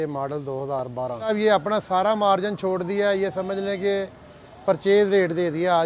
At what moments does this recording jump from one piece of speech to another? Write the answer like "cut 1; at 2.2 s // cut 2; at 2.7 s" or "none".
cut 1; at 1.3 s